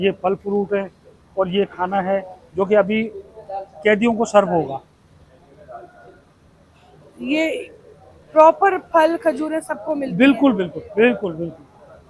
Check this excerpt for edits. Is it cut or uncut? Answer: uncut